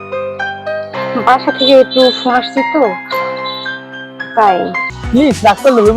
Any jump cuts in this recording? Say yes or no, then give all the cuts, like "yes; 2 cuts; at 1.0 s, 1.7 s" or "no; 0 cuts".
yes; 1 cut; at 4.8 s